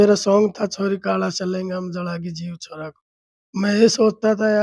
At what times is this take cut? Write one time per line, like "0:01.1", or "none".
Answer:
none